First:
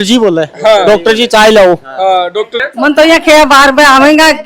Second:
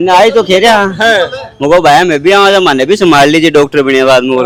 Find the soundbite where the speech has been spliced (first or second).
first